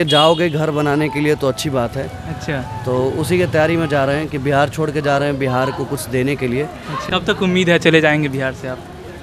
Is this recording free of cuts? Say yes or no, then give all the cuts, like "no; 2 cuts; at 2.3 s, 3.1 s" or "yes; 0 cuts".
no; 1 cut; at 7.0 s